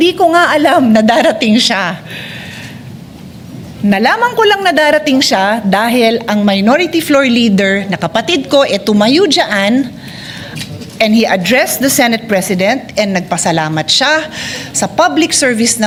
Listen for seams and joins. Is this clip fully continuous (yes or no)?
yes